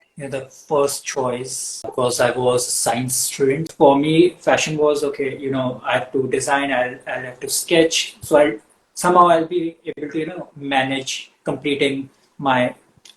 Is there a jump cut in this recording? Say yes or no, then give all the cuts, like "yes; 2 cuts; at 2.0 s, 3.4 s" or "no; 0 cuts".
yes; 2 cuts; at 1.9 s, 3.7 s